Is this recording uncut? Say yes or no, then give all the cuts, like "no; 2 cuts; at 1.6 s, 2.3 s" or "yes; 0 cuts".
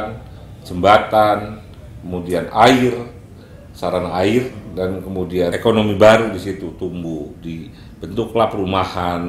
no; 1 cut; at 5.6 s